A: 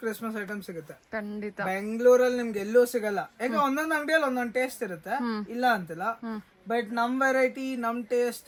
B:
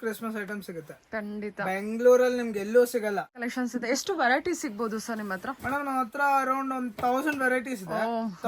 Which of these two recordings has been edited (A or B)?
B